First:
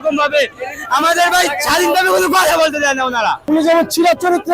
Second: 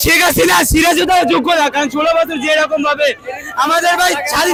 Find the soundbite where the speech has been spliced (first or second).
first